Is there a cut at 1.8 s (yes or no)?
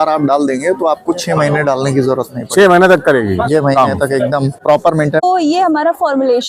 no